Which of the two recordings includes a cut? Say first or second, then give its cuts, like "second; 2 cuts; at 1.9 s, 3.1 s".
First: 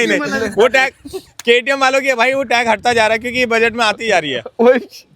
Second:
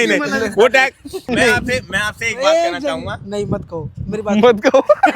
second; 1 cut; at 1.3 s